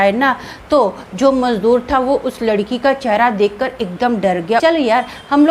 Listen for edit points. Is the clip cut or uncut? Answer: cut